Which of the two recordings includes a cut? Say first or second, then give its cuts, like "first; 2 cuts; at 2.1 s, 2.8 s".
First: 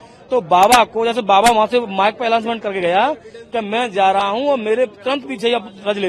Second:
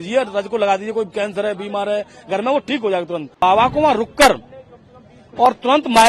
second; 1 cut; at 3.4 s